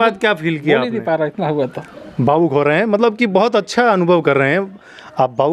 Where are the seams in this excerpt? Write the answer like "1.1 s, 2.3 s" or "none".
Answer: none